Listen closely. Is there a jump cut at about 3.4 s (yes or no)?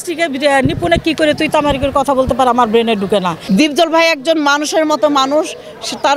yes